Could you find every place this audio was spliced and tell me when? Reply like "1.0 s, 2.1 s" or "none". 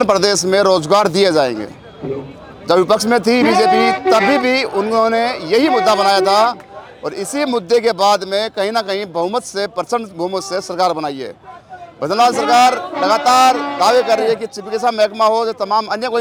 none